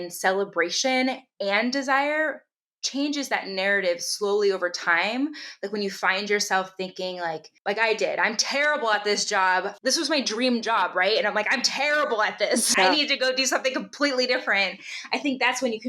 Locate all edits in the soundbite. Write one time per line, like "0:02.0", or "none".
0:09.7
0:12.7